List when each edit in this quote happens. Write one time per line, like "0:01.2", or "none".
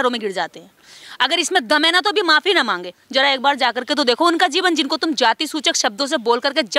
0:03.0